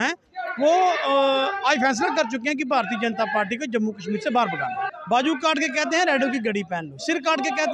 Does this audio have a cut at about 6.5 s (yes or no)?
no